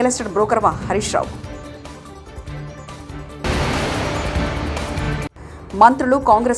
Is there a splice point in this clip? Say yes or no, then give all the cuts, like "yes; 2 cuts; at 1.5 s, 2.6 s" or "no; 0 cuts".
yes; 2 cuts; at 3.4 s, 5.4 s